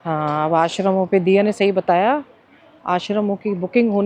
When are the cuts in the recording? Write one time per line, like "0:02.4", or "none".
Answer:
none